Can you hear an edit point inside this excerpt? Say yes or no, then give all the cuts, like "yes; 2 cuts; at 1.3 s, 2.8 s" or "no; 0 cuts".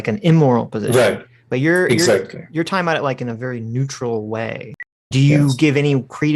yes; 1 cut; at 5.1 s